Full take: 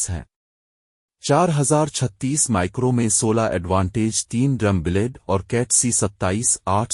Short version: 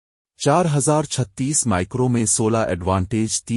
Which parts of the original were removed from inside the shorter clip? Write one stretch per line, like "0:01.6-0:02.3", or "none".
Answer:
none